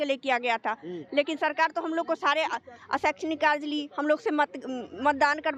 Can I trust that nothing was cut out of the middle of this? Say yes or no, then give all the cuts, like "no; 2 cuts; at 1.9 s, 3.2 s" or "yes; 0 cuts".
yes; 0 cuts